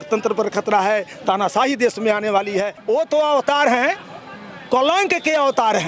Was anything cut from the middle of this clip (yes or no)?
yes